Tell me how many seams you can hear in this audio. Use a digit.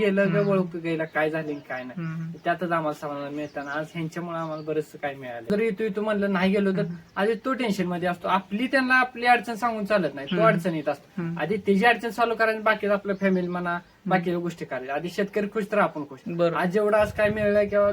1